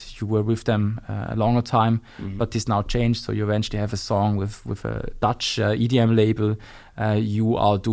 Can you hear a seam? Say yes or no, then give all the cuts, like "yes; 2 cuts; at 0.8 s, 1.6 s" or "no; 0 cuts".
no; 0 cuts